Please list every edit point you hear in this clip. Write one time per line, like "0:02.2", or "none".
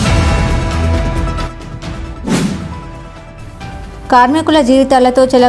0:02.4

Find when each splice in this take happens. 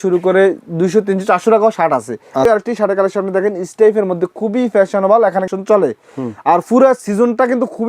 0:02.4
0:05.5

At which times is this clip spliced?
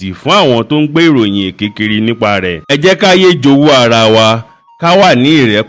0:02.6

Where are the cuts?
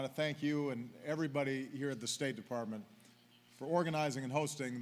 none

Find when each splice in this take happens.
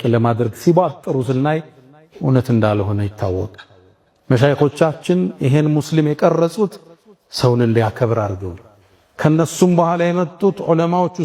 none

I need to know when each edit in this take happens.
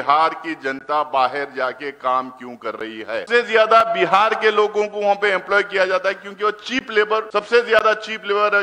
0:03.3
0:07.3

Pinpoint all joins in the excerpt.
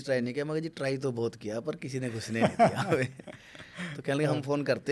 none

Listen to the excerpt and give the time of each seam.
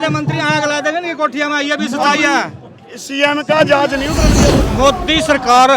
0:04.3

